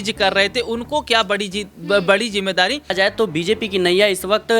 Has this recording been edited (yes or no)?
yes